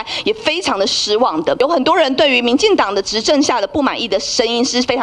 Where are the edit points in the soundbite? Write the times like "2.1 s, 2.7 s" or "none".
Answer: 1.6 s